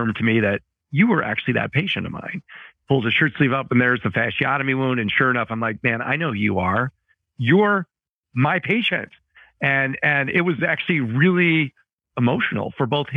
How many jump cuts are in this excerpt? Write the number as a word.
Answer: zero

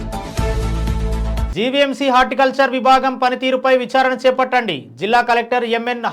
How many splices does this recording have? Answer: one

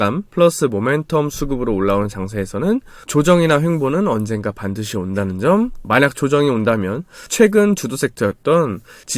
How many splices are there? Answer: one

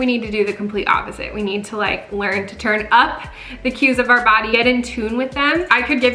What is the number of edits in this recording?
zero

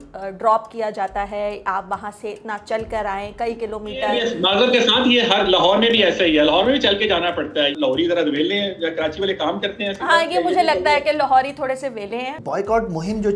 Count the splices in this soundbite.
three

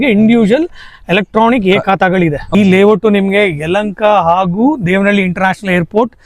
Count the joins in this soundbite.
one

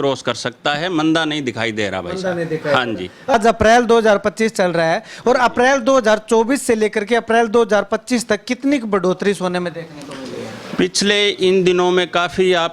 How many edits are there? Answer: one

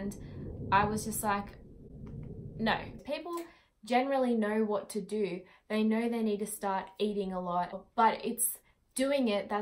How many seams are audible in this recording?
two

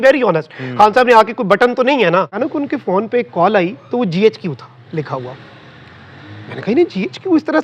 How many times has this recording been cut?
one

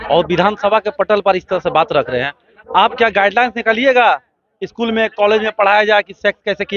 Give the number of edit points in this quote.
zero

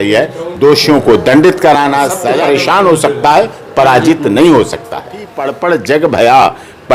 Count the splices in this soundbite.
two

